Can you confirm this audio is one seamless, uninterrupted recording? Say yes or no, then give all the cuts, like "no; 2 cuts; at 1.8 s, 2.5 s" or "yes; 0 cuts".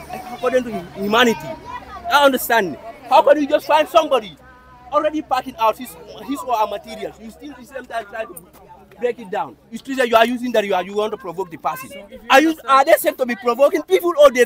yes; 0 cuts